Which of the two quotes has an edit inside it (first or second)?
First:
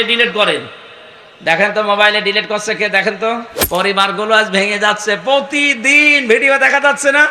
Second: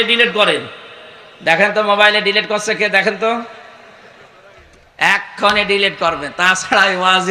first